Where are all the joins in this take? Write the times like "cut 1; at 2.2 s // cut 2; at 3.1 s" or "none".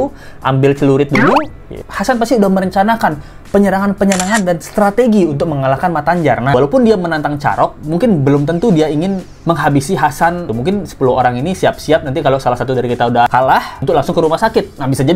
cut 1; at 1.9 s // cut 2; at 6.5 s // cut 3; at 9.3 s // cut 4; at 10.5 s // cut 5; at 13.7 s

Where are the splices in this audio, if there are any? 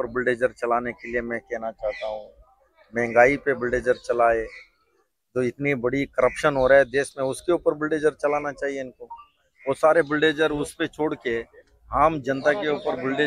none

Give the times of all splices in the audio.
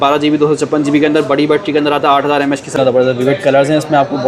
cut 1; at 2.7 s

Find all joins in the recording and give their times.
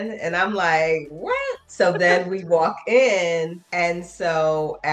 none

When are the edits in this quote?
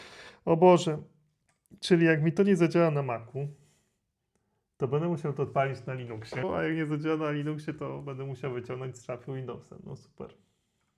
cut 1; at 6.4 s

